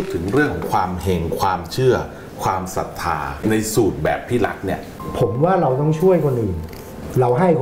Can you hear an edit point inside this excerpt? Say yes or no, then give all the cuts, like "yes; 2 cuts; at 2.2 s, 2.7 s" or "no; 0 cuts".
yes; 2 cuts; at 3.4 s, 5.0 s